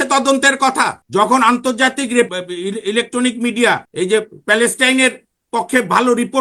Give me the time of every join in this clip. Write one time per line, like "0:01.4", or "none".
0:01.0
0:02.3
0:03.9